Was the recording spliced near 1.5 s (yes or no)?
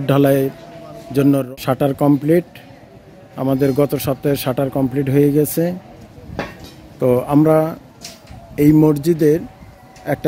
yes